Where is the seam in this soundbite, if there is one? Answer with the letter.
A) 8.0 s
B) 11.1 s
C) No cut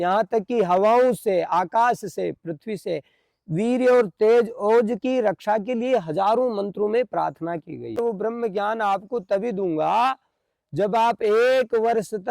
A